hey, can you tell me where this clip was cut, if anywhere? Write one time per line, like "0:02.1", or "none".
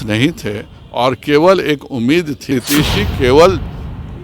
0:02.5